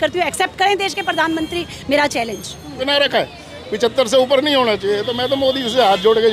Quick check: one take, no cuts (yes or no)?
no